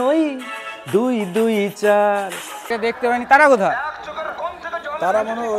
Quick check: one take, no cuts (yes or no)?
no